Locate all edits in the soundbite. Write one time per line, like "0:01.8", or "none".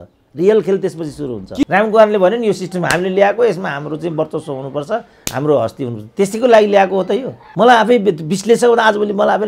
0:01.6
0:07.4